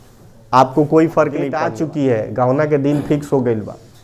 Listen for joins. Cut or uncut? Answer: cut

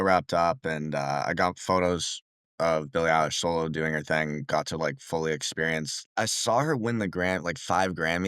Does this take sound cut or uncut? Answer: cut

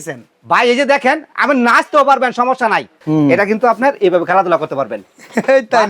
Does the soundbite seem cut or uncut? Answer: cut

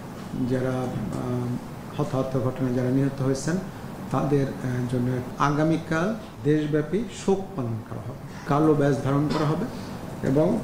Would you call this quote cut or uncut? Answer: cut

